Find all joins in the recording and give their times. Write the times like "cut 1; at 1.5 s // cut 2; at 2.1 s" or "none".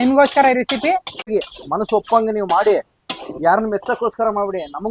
cut 1; at 1.2 s